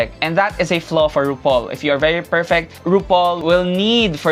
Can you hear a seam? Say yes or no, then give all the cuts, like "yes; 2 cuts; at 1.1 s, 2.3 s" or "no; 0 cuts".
no; 0 cuts